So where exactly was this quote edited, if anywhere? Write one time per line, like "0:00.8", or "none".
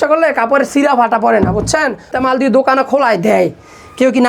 0:02.1

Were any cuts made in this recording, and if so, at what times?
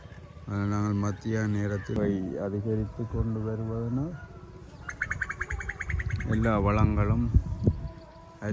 0:02.0

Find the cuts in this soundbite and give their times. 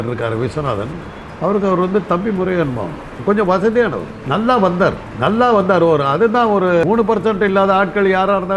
0:03.1
0:04.1
0:05.1
0:06.8

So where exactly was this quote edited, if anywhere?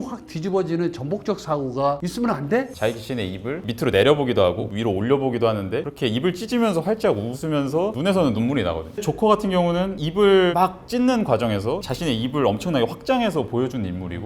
0:02.7
0:09.0

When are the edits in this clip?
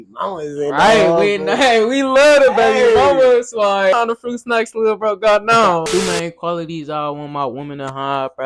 0:03.9
0:05.8

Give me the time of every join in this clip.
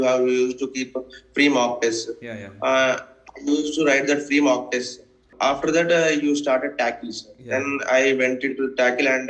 0:05.3

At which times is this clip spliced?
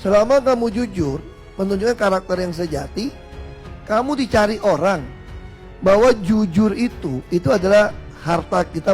0:05.3

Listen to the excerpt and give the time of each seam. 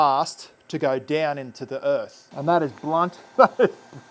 0:02.2
0:03.2

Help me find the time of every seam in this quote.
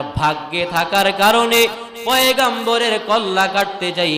none

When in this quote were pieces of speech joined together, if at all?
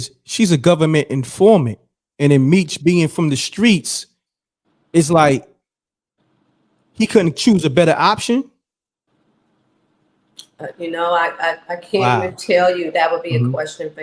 none

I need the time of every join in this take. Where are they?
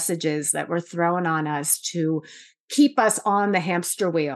none

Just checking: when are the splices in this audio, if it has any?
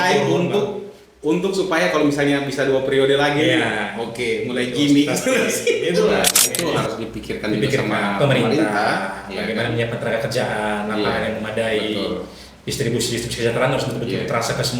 0:06.4

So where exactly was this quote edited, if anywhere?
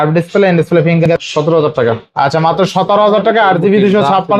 0:01.1

